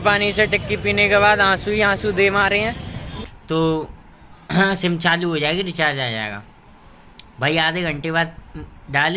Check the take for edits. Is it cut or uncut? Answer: cut